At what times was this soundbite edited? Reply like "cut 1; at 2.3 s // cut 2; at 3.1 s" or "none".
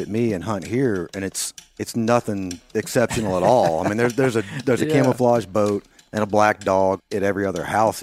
cut 1; at 7.0 s